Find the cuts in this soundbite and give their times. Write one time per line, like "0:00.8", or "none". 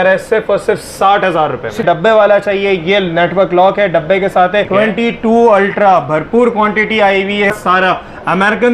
0:01.8
0:04.7
0:07.5